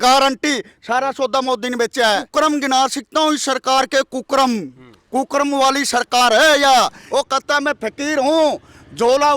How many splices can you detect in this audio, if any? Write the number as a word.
two